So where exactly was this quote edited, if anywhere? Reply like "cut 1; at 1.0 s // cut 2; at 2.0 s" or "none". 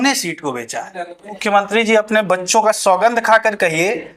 cut 1; at 1.4 s